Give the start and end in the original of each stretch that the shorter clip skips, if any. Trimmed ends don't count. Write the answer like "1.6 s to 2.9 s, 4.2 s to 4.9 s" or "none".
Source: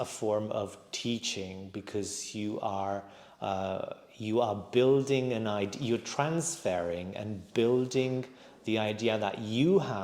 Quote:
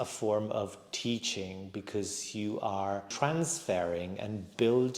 3.1 s to 6.1 s